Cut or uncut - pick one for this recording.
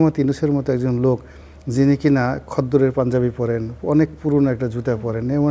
uncut